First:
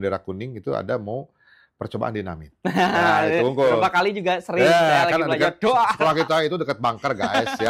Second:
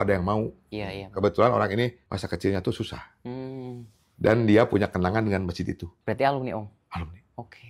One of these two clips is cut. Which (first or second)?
second